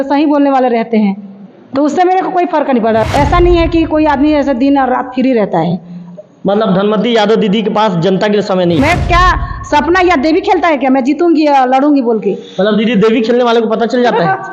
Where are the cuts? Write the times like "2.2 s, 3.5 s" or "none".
3.1 s, 8.8 s